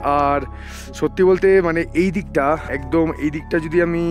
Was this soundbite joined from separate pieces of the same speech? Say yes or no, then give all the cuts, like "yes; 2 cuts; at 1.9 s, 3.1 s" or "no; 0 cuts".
yes; 1 cut; at 2.7 s